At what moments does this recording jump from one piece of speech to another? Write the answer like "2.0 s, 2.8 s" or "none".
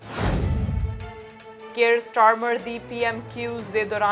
1.6 s